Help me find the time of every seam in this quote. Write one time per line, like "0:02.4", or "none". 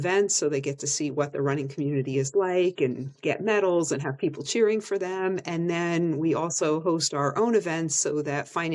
none